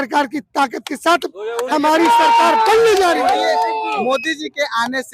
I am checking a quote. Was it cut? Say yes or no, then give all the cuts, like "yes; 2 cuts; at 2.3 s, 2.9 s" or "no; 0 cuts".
no; 0 cuts